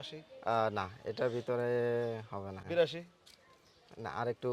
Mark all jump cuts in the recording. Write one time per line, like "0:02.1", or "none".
0:02.6